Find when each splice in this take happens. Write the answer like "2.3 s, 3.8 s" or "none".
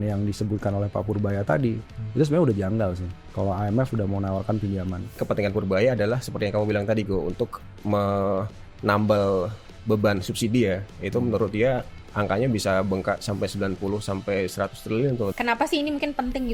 5.2 s, 15.3 s